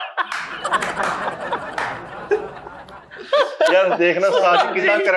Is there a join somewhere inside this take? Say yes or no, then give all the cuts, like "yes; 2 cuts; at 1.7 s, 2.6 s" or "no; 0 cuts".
no; 0 cuts